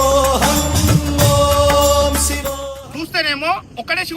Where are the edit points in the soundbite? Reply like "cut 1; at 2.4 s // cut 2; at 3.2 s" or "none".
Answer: cut 1; at 2.8 s